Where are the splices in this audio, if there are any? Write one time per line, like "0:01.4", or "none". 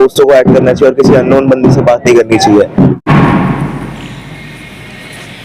0:03.0

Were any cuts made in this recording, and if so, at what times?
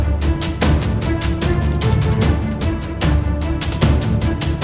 none

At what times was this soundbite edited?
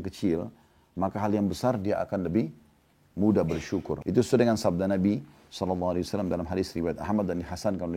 0:04.0

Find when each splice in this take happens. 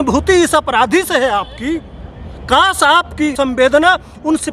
0:03.3

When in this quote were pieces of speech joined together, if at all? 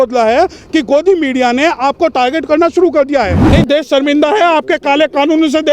0:03.4

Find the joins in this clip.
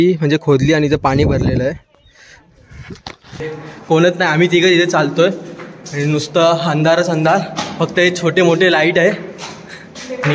0:03.5

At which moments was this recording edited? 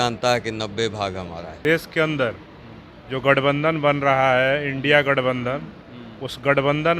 0:01.5

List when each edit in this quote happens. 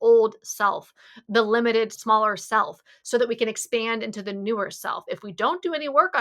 0:02.0
0:05.0

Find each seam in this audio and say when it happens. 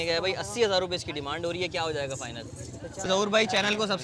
0:03.1

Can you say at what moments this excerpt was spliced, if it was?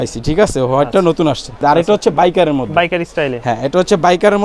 0:01.6

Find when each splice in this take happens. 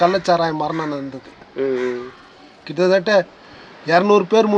none

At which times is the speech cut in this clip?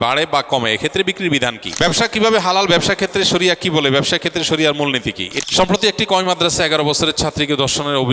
0:01.6
0:05.3

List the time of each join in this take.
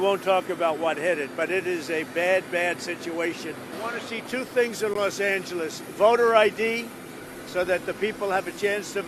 0:03.7

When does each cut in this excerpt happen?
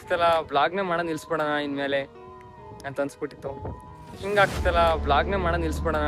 0:04.2

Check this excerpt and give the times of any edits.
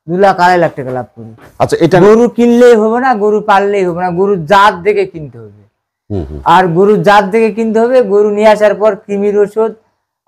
none

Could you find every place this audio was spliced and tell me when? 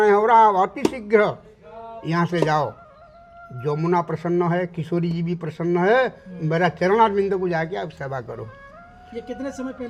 none

